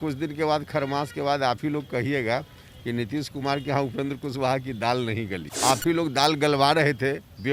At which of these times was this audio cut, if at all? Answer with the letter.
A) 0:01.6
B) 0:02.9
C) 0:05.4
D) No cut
C